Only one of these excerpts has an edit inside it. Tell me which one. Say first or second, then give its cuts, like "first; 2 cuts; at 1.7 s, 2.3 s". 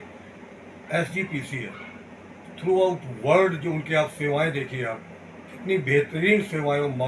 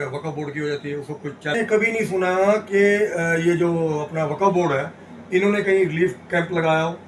second; 1 cut; at 1.5 s